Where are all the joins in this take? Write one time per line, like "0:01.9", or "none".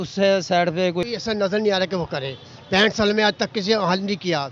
0:01.0